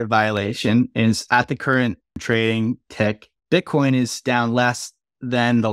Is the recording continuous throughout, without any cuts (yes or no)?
no